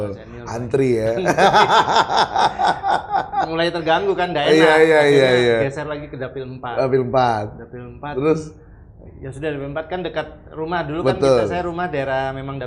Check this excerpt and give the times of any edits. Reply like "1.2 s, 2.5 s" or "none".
none